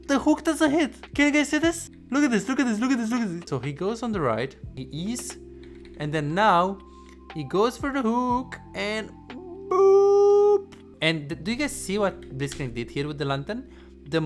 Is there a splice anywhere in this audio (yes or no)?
yes